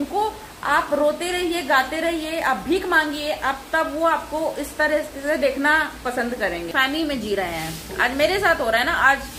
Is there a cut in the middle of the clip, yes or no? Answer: yes